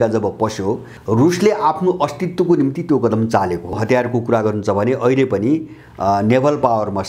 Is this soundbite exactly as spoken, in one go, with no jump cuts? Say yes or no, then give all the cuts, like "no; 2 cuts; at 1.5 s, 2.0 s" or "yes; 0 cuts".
no; 2 cuts; at 0.9 s, 3.8 s